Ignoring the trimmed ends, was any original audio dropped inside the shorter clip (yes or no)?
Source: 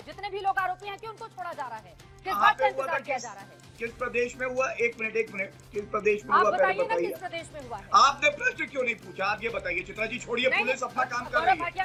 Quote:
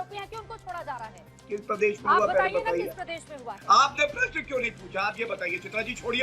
yes